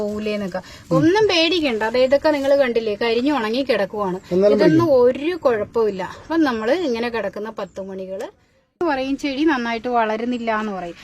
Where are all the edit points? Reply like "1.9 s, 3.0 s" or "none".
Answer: 8.8 s